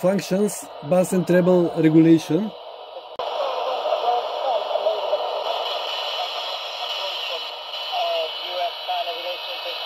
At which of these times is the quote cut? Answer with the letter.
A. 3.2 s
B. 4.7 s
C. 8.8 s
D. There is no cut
A